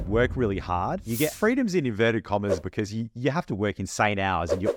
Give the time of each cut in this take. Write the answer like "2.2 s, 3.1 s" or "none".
1.3 s, 2.6 s